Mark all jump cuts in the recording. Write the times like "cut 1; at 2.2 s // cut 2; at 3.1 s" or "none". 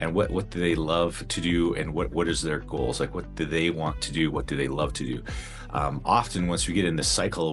none